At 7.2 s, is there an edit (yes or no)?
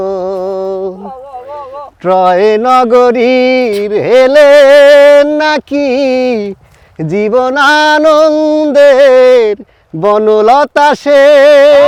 no